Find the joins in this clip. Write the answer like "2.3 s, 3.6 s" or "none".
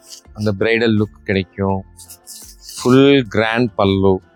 none